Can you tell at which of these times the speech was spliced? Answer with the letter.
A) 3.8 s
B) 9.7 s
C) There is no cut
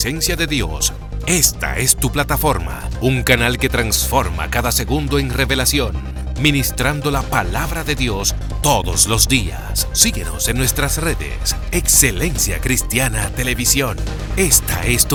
C